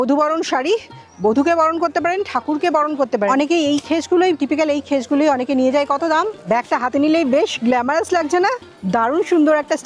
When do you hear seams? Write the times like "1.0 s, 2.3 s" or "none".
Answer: 3.3 s, 6.4 s